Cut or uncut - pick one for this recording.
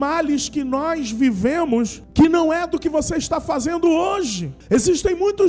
cut